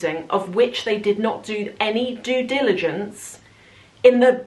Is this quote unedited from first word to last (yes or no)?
yes